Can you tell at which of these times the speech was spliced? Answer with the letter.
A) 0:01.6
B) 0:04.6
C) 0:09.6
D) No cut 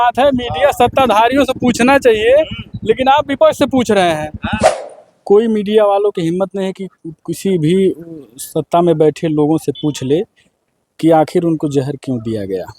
B